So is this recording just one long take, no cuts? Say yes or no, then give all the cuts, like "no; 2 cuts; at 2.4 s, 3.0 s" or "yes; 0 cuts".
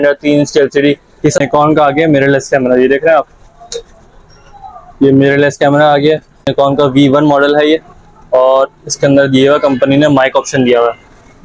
no; 2 cuts; at 1.4 s, 6.5 s